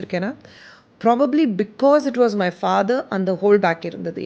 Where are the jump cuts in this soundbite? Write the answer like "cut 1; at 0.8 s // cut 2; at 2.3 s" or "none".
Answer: none